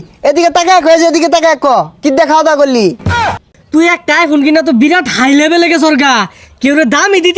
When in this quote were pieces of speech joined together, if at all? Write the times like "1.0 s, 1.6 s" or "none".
3.1 s